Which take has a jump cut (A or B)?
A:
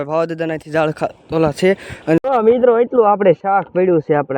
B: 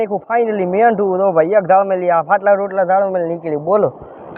A